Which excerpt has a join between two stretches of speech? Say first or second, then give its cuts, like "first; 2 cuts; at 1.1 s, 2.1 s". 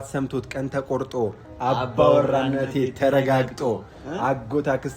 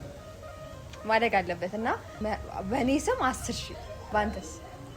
second; 2 cuts; at 2.2 s, 4.0 s